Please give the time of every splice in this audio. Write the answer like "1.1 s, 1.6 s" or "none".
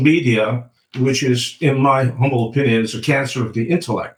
none